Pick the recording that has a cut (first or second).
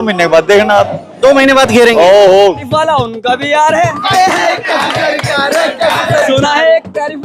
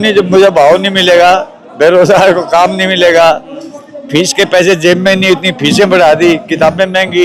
first